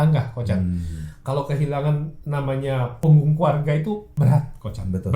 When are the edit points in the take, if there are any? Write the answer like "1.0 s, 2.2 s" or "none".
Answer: 2.9 s, 4.1 s